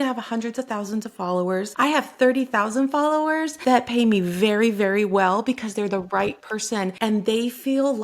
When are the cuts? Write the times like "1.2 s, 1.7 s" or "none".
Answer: 1.7 s, 3.5 s, 6.9 s